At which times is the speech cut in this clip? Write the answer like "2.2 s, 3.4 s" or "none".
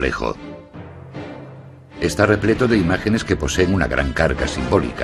3.0 s